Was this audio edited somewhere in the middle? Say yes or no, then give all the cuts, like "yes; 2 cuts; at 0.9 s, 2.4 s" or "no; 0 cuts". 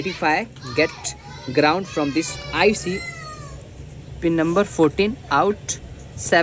yes; 1 cut; at 3.0 s